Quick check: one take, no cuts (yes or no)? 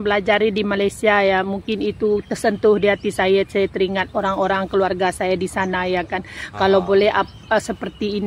yes